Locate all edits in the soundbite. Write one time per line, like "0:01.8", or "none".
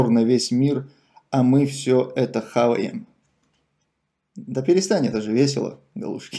none